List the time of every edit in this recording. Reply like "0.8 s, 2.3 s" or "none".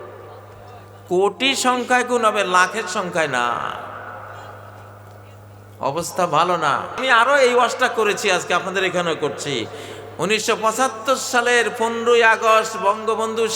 7.0 s